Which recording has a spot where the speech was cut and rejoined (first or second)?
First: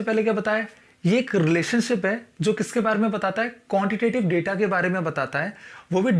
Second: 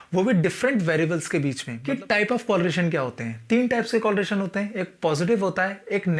second